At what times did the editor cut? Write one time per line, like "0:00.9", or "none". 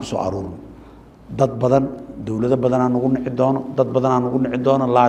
none

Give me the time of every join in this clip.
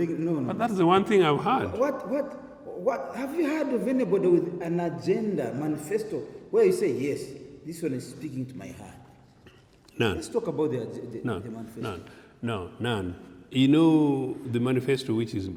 none

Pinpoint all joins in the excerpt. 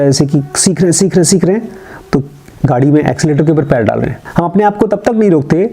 0:04.2

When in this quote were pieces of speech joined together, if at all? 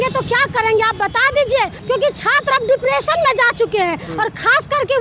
0:01.8

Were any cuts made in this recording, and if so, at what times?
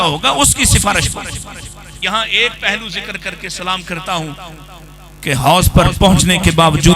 0:02.0

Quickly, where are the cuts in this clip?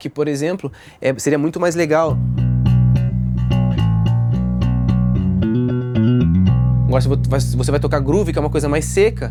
none

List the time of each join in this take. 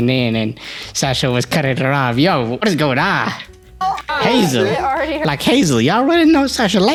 none

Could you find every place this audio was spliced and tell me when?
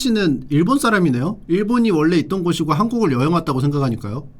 0:01.3

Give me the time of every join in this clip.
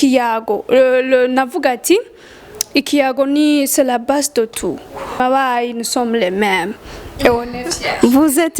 0:05.2

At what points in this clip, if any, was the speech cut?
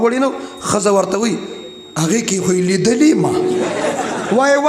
0:03.7

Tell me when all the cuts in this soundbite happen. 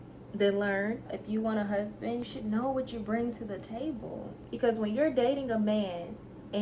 0:01.1
0:04.3

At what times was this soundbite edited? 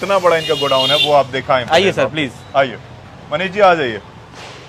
none

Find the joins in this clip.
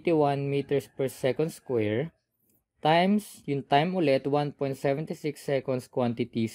none

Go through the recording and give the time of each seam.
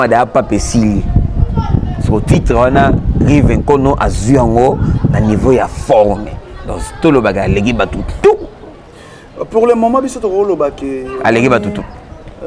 none

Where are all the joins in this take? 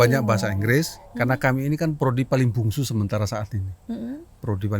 0:01.0

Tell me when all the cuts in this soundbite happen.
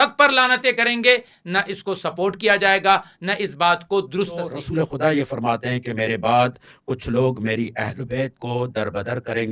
0:04.6

